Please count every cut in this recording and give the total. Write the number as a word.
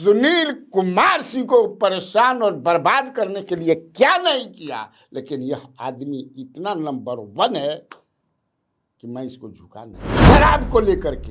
one